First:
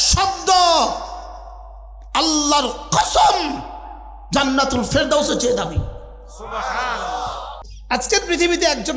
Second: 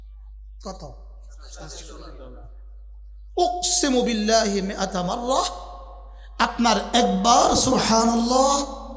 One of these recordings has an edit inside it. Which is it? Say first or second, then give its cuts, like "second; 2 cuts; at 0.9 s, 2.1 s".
first; 1 cut; at 7.7 s